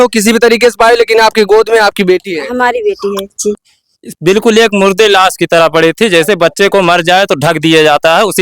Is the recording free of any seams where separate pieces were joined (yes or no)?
no